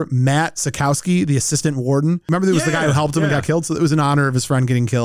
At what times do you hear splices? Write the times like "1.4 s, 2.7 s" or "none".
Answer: 2.2 s